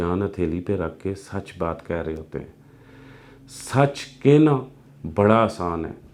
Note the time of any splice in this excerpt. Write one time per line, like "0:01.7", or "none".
none

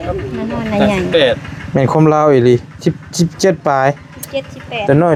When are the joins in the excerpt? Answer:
none

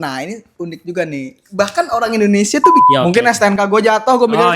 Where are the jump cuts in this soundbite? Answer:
0:02.8

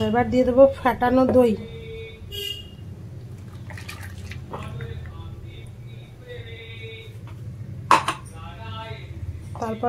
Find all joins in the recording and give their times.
none

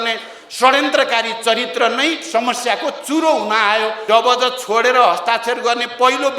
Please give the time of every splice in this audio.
0:04.0

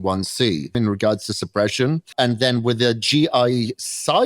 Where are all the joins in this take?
0:00.8
0:02.1

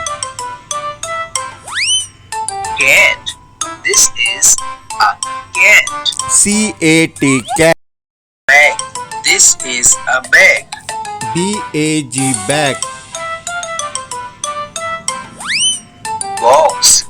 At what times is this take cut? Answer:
none

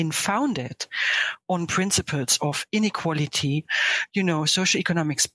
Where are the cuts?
0:03.8

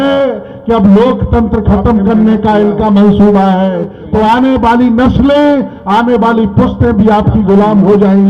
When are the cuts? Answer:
0:04.0

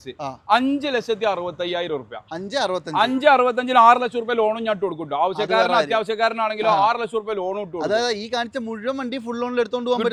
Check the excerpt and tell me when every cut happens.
none

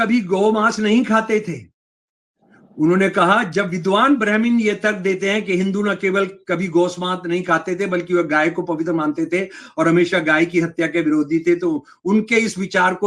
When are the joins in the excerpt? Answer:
none

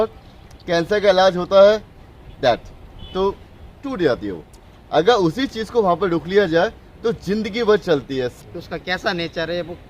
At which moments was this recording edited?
0:08.3

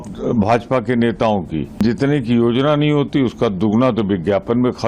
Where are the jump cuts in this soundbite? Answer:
0:01.8

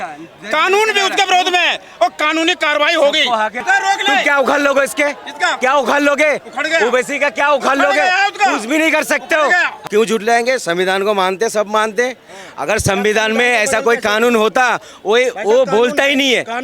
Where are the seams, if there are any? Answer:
0:03.6
0:09.7

